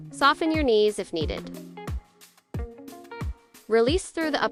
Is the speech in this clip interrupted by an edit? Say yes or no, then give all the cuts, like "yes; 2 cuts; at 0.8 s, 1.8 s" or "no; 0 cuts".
no; 0 cuts